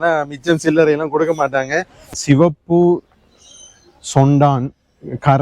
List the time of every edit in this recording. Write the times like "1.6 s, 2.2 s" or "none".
2.1 s